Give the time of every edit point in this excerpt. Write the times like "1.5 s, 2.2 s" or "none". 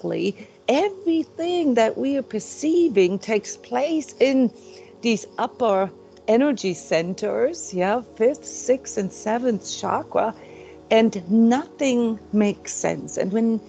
none